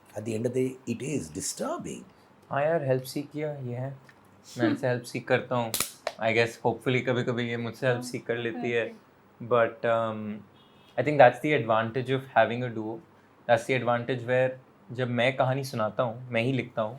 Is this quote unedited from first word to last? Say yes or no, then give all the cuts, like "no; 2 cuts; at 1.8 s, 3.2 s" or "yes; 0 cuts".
yes; 0 cuts